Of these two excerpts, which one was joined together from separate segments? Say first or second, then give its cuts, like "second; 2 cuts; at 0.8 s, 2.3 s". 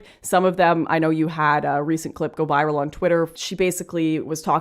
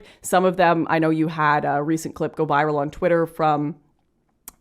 first; 1 cut; at 3.3 s